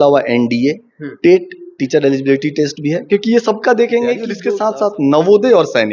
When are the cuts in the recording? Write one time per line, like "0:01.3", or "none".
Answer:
0:04.3